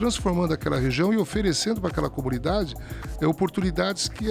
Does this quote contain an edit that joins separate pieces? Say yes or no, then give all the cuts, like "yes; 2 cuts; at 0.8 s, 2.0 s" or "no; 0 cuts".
no; 0 cuts